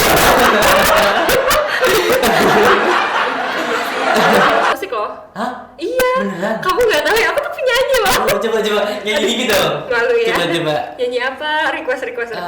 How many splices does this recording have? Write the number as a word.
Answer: one